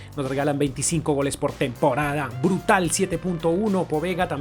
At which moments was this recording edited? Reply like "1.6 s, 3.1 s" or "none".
none